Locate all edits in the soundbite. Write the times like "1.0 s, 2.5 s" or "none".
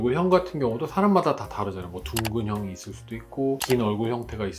none